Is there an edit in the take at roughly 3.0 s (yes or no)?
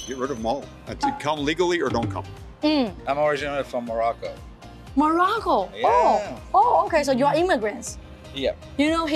no